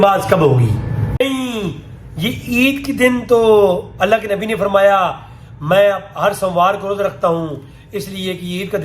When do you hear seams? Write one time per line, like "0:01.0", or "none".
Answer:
0:01.2